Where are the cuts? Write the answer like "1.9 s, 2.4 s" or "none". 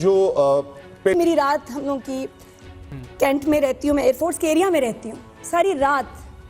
1.1 s